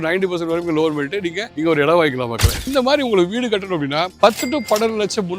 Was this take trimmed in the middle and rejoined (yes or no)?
yes